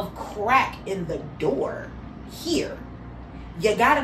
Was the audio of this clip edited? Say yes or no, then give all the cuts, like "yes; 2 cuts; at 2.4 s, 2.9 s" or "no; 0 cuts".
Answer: no; 0 cuts